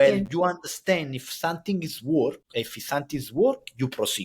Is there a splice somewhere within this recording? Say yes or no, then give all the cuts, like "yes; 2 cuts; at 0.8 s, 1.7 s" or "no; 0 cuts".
yes; 1 cut; at 2.4 s